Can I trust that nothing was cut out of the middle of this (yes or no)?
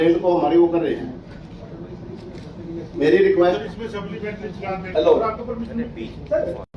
yes